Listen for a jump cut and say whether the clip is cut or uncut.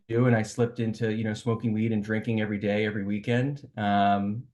uncut